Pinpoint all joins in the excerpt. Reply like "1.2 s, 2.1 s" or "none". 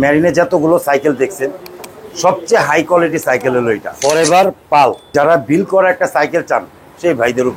3.9 s, 5.1 s